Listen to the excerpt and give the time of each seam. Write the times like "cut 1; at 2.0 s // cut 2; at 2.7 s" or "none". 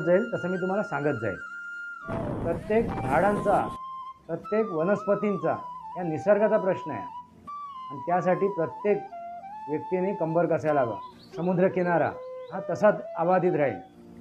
cut 1; at 2.0 s // cut 2; at 11.1 s

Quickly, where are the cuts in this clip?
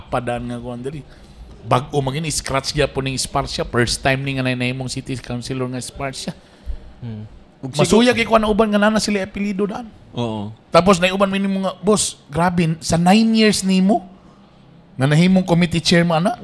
cut 1; at 10.5 s

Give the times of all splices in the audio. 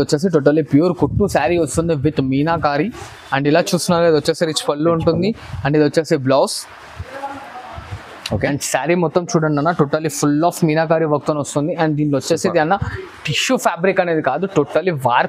none

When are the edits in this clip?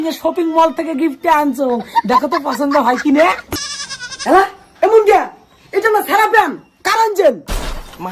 cut 1; at 3.5 s

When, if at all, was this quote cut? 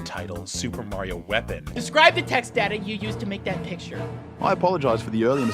cut 1; at 1.8 s

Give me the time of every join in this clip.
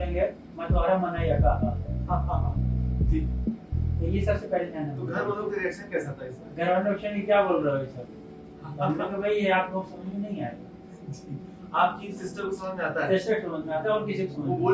none

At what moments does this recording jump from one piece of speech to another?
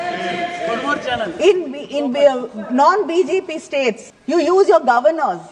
cut 1; at 4.1 s

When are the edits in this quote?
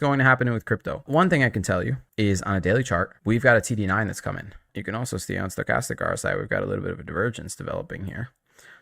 cut 1; at 1.0 s // cut 2; at 4.6 s

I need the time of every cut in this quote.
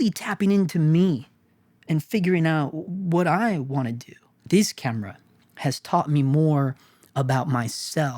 cut 1; at 2.9 s // cut 2; at 4.2 s

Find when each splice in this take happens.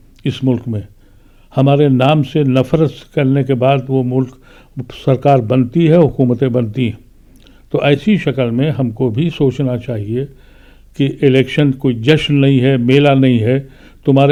none

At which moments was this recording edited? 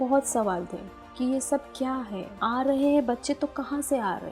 cut 1; at 2.3 s

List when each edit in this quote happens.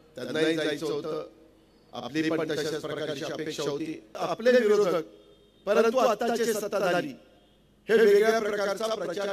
cut 1; at 4.1 s

